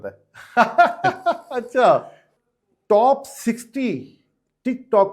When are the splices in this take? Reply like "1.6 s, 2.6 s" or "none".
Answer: 2.2 s